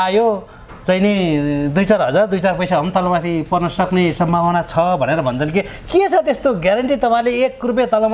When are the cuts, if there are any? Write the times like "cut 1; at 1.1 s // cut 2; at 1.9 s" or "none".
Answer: none